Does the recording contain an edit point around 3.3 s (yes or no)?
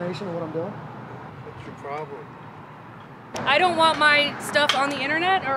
yes